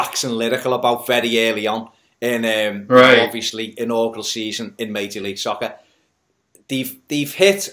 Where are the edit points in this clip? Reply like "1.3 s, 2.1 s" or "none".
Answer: 5.4 s